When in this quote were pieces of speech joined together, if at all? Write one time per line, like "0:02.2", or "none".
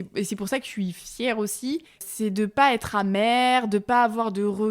0:02.1